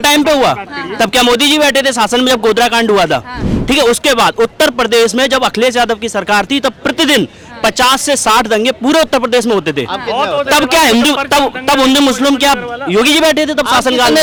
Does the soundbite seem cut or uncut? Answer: uncut